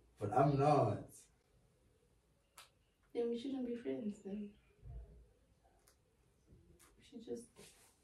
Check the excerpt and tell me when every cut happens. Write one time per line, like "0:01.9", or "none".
none